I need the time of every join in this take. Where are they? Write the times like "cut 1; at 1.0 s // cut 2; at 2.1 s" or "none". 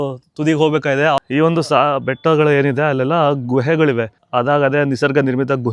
cut 1; at 1.2 s // cut 2; at 4.2 s

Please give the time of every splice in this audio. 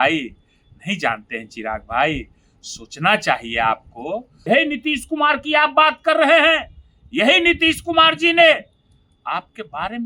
cut 1; at 4.3 s

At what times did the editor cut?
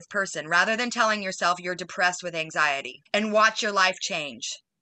cut 1; at 2.9 s

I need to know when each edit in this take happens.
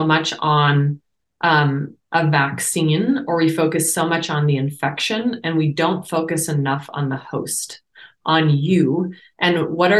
none

